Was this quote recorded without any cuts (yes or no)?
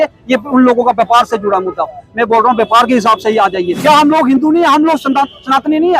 no